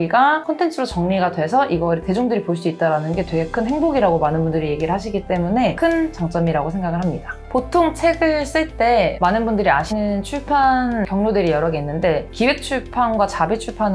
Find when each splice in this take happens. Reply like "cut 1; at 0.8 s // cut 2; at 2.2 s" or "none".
cut 1; at 5.8 s // cut 2; at 7.3 s // cut 3; at 9.9 s // cut 4; at 11.1 s